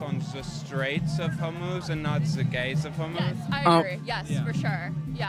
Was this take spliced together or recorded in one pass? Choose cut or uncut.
uncut